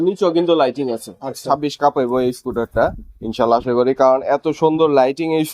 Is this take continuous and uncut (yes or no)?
no